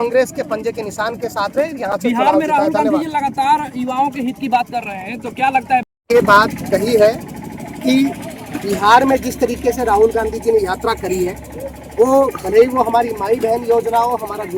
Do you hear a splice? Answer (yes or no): no